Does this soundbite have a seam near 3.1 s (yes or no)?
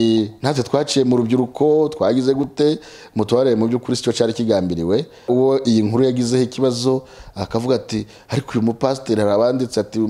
no